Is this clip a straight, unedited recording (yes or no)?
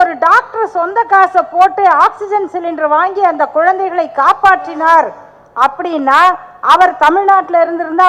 yes